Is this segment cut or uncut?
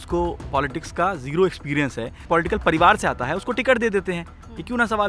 cut